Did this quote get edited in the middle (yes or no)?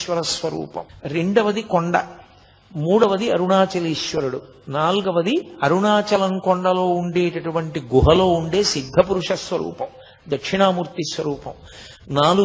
yes